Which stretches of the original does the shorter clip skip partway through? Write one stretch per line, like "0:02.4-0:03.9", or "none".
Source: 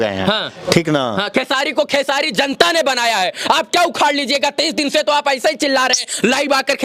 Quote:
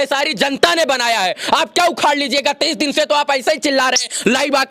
none